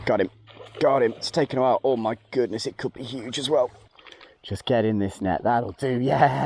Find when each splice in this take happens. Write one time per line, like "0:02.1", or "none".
0:03.8